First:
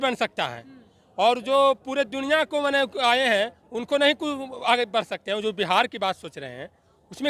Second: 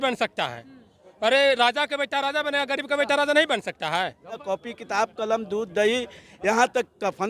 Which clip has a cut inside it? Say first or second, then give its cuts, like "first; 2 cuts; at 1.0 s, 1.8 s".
second; 2 cuts; at 1.0 s, 4.4 s